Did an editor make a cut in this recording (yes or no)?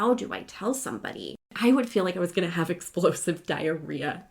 yes